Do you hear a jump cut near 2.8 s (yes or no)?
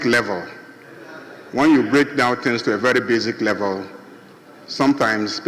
no